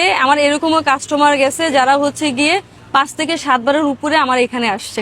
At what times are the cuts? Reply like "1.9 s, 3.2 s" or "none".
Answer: none